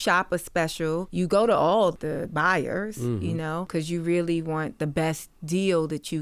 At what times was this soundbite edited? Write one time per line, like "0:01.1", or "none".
0:01.1
0:01.9
0:03.7